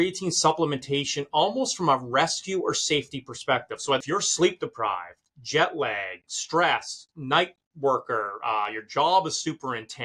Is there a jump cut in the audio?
yes; 1 cut; at 4.0 s

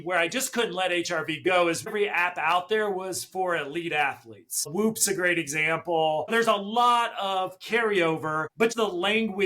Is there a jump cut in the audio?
yes; 3 cuts; at 1.9 s, 6.3 s, 8.7 s

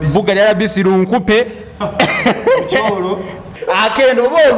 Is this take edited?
yes; 1 cut; at 3.5 s

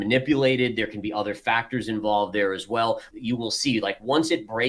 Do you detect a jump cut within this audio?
yes; 1 cut; at 3.1 s

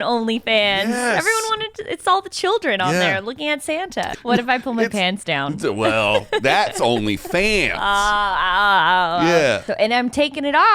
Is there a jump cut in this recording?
yes; 2 cuts; at 4.1 s, 9.7 s

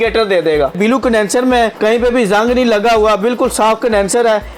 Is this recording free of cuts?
no; 2 cuts; at 0.8 s, 1.7 s

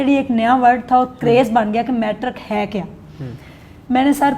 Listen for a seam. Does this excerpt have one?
no; 0 cuts

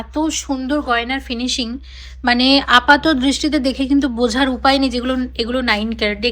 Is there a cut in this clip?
no; 0 cuts

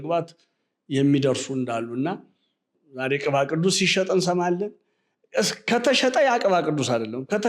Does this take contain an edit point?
yes; 1 cut; at 2.8 s

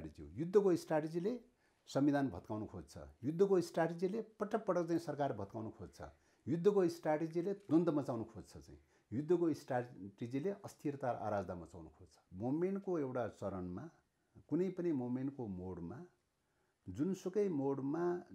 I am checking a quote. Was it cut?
yes; 1 cut; at 12.2 s

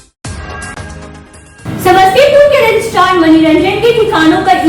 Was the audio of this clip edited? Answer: yes; 1 cut; at 1.3 s

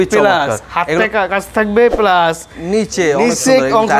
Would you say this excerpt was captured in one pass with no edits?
yes; 0 cuts

